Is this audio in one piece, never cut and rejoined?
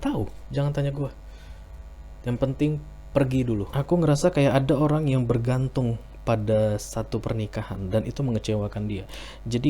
no; 1 cut; at 3.7 s

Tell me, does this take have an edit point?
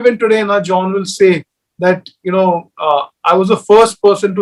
no; 0 cuts

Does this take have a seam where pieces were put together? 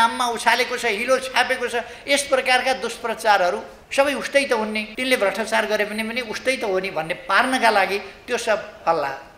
yes; 2 cuts; at 3.7 s, 4.9 s

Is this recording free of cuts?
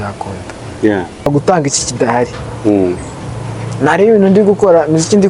no; 1 cut; at 1.3 s

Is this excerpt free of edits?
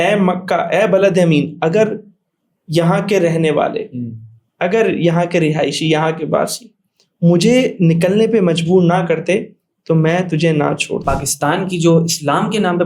no; 1 cut; at 11.0 s

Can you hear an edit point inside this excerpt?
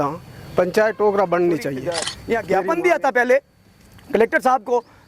yes; 1 cut; at 2.2 s

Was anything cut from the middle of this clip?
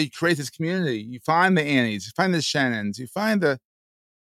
no; 0 cuts

